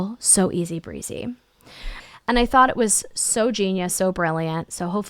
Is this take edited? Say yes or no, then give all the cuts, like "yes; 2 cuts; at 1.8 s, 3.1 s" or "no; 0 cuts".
yes; 1 cut; at 1.9 s